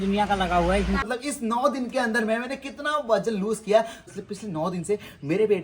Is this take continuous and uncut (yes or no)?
no